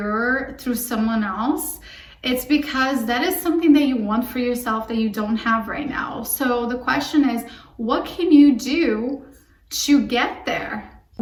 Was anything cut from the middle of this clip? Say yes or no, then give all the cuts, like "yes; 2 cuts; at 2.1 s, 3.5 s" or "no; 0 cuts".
no; 0 cuts